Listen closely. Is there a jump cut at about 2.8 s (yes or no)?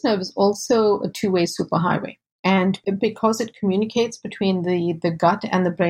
yes